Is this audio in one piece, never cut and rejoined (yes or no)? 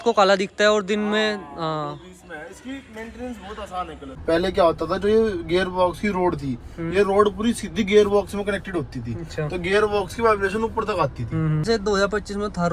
no